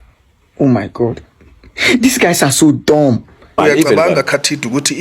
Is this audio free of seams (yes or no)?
no